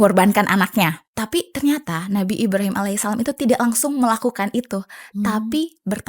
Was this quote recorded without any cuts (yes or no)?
no